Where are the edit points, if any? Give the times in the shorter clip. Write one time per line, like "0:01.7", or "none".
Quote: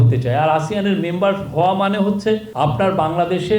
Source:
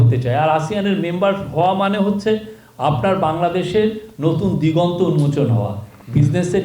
0:02.5